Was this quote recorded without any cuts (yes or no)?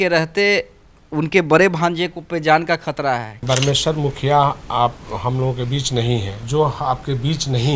no